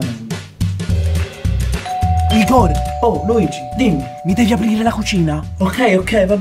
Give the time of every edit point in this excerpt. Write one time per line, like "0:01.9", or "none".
none